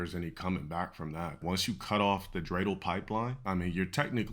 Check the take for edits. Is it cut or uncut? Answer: cut